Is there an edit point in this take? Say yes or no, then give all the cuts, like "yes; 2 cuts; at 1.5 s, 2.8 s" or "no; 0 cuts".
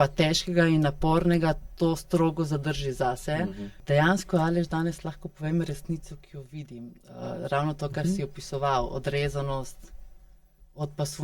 yes; 1 cut; at 3.8 s